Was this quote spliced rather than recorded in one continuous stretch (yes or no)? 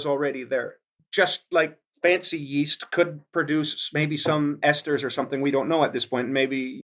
no